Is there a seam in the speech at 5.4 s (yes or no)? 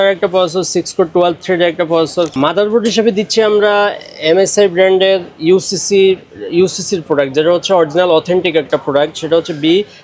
no